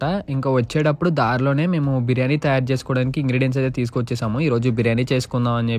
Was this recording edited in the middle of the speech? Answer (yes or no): no